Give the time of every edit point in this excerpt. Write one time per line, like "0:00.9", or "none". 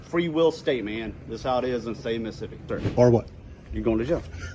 0:02.8